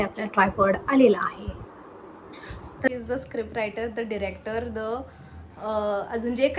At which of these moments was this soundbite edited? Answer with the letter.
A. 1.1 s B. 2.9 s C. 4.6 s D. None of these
B